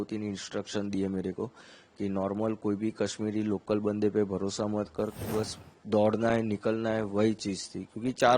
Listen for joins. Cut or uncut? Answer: cut